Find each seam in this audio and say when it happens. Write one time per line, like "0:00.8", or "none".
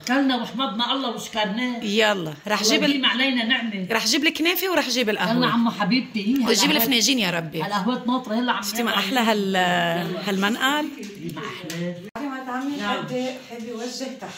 0:12.2